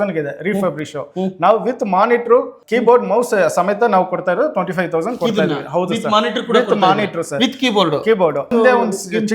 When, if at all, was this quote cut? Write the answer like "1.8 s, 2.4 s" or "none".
2.6 s, 8.5 s